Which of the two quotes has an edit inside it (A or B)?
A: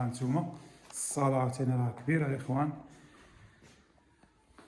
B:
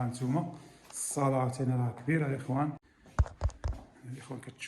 B